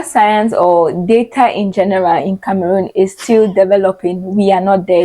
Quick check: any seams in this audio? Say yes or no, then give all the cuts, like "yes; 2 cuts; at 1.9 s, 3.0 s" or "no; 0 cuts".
no; 0 cuts